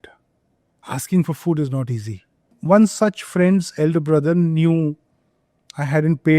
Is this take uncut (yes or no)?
no